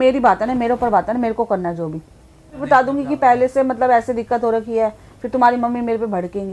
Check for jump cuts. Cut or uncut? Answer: cut